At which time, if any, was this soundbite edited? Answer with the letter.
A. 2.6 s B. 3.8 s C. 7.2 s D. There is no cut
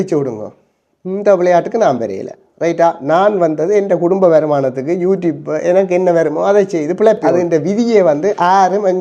C